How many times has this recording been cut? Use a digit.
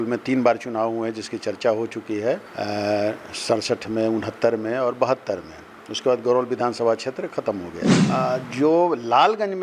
1